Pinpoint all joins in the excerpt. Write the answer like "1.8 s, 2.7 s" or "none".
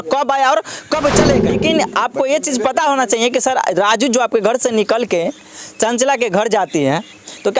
1.6 s